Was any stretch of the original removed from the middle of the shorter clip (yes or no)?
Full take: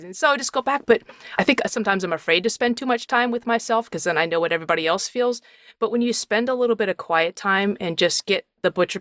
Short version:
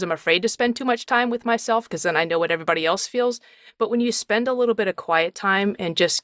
no